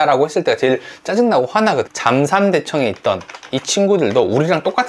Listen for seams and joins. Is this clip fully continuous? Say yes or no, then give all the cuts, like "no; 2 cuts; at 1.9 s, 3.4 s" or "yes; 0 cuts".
no; 1 cut; at 1.9 s